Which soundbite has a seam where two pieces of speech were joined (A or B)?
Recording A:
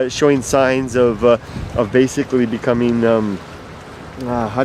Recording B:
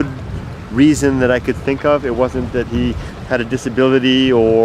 B